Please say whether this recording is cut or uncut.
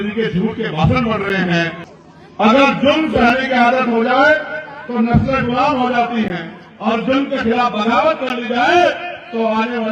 cut